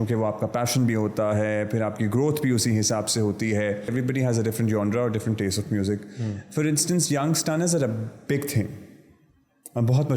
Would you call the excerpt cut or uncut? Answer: cut